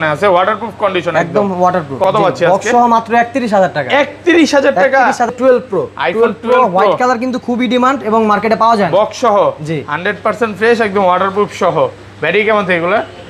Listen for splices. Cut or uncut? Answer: cut